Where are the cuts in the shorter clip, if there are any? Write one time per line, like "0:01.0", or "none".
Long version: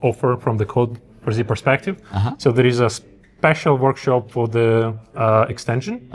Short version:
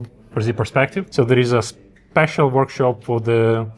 0:01.1